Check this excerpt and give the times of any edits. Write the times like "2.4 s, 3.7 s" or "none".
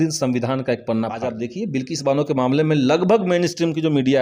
1.2 s